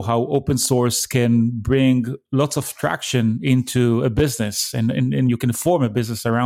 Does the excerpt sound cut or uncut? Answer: uncut